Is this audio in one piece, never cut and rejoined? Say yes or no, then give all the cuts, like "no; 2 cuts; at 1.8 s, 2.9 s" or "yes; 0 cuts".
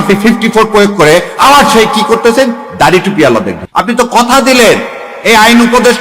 no; 1 cut; at 3.6 s